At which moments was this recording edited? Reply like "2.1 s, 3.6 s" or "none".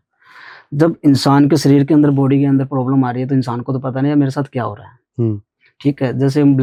none